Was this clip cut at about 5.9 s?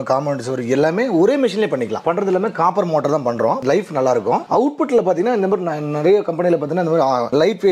no; 2 cuts; at 2.0 s, 4.5 s

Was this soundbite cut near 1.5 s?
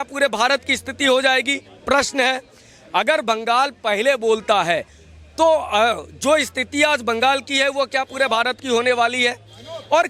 no; 0 cuts

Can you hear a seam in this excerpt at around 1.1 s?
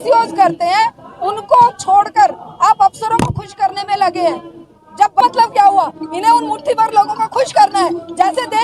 no; 1 cut; at 5.2 s

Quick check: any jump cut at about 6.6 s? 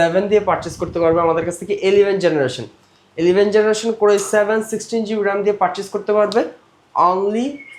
no; 0 cuts

